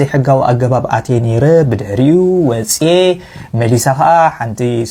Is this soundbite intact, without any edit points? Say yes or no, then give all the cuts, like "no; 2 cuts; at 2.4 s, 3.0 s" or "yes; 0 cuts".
yes; 0 cuts